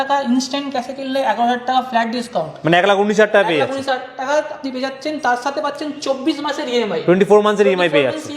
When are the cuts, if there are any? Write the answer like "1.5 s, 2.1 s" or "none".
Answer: none

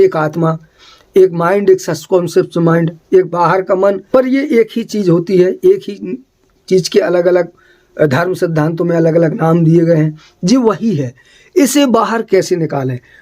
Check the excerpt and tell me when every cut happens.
4.0 s

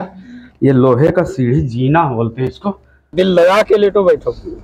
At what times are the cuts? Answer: 3.1 s

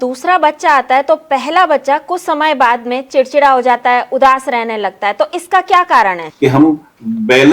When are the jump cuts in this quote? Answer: 6.2 s

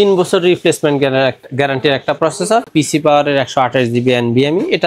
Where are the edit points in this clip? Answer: 2.7 s

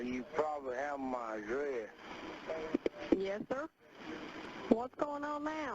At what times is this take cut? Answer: 3.4 s

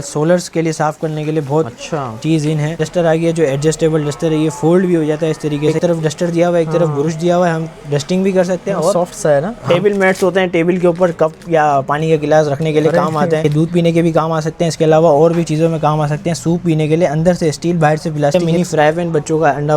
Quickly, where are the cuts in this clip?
2.8 s, 5.7 s, 9.6 s, 13.5 s, 18.3 s

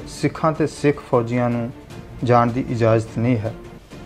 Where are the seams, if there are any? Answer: none

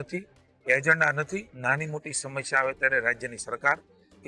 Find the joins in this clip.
1.5 s

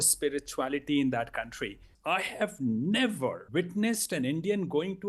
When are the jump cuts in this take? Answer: 1.9 s, 3.4 s

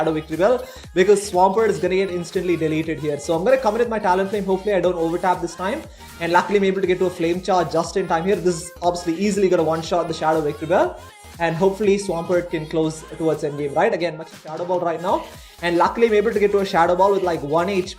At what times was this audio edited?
14.3 s

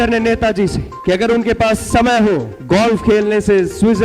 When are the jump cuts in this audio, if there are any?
0.9 s, 2.5 s

